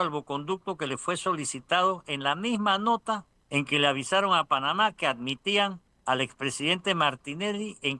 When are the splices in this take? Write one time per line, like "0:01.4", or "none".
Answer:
0:03.3
0:05.9